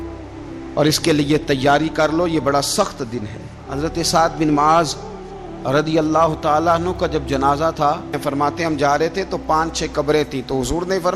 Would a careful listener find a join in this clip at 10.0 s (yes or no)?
no